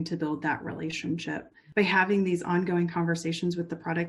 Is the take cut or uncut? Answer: cut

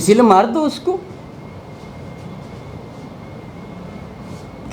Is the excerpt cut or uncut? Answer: uncut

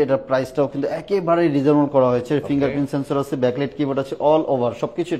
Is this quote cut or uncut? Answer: uncut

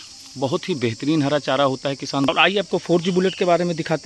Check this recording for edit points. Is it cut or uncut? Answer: cut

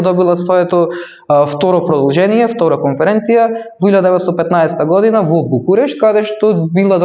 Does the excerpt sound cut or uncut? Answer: uncut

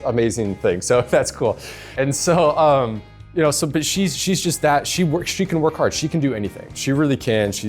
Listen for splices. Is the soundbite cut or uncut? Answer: cut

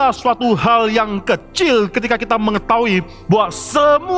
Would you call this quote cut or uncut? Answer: uncut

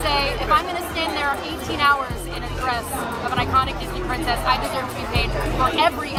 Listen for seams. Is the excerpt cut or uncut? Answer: uncut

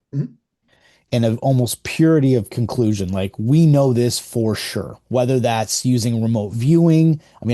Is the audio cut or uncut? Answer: uncut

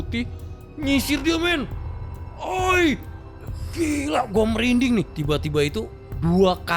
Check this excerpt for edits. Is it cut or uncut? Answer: cut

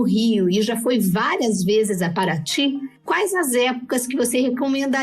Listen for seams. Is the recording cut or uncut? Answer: uncut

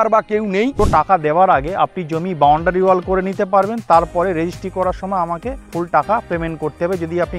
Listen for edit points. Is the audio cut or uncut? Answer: cut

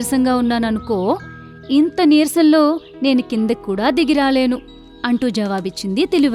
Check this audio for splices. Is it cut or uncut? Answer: uncut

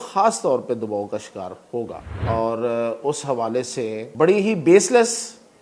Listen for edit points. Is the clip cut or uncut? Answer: cut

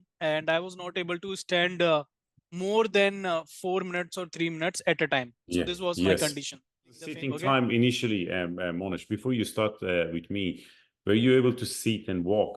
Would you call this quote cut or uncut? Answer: cut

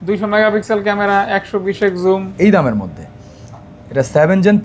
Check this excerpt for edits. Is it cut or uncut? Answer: cut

